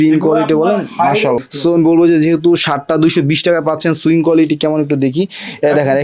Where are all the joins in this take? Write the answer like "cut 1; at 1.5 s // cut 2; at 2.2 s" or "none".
cut 1; at 1.4 s